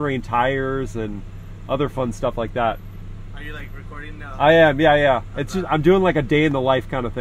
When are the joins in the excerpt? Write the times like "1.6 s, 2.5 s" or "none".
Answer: none